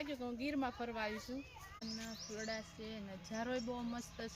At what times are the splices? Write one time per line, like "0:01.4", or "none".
0:01.8